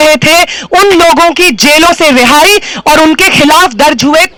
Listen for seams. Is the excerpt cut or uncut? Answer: uncut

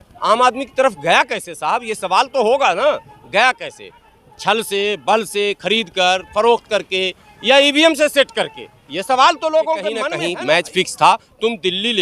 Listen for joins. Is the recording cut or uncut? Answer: cut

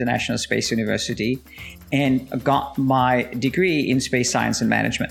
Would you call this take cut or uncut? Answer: uncut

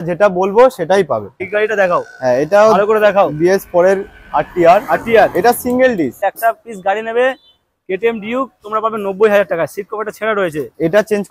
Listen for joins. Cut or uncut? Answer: cut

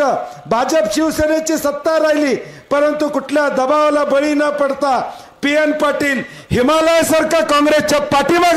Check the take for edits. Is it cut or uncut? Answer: uncut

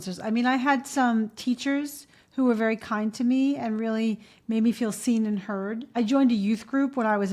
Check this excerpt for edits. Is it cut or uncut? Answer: uncut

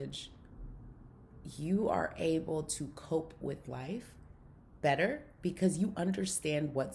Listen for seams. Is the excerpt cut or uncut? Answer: uncut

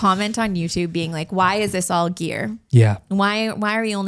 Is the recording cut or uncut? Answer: uncut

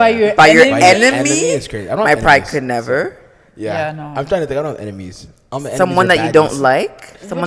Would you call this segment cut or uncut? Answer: uncut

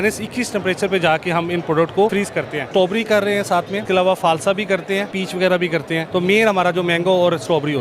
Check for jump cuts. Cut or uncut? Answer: cut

